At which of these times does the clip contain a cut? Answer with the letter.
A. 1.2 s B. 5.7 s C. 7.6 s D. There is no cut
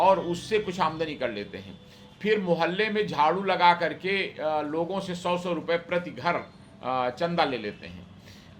D